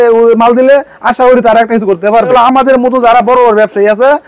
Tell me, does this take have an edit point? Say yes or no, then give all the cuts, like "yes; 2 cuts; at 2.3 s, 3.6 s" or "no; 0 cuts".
yes; 1 cut; at 2.3 s